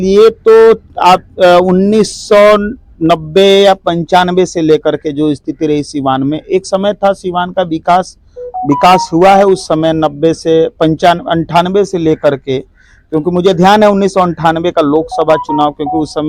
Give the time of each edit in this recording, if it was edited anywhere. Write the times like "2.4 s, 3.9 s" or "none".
none